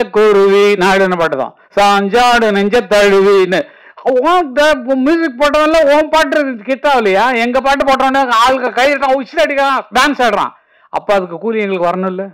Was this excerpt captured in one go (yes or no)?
yes